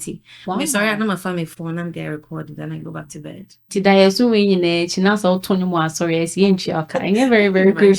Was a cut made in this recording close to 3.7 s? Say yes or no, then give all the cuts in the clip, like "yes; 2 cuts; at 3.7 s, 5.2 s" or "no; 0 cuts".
yes; 1 cut; at 3.7 s